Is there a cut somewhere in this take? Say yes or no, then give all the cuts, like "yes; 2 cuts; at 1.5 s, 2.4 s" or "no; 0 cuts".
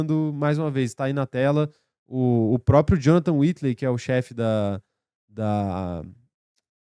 no; 0 cuts